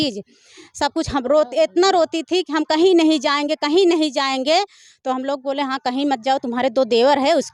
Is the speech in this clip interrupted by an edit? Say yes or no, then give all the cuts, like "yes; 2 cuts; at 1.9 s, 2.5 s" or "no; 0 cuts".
no; 0 cuts